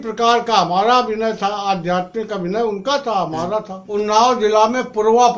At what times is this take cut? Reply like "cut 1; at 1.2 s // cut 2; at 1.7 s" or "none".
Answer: cut 1; at 3.8 s